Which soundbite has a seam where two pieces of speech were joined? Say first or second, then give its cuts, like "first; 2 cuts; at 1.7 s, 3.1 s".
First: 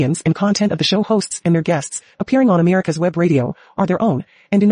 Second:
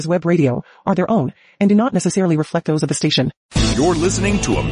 second; 1 cut; at 3.4 s